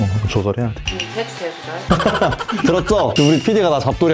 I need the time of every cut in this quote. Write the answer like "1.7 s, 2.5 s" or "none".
none